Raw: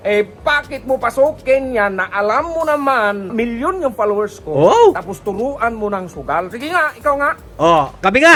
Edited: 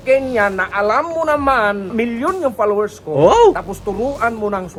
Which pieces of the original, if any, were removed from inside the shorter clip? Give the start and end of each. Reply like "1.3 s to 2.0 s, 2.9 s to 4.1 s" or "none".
none